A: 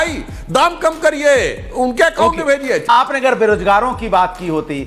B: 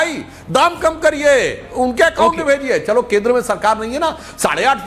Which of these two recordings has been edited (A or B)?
A